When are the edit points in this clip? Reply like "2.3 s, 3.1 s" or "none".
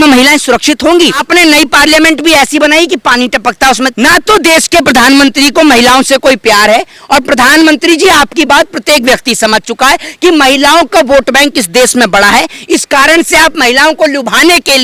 1.2 s, 3.9 s